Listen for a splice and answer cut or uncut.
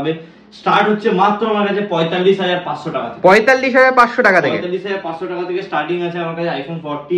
uncut